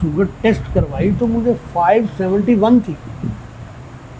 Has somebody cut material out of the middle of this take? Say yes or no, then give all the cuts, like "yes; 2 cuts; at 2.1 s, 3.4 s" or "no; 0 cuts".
no; 0 cuts